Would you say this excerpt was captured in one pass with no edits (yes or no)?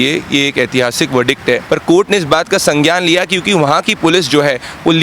no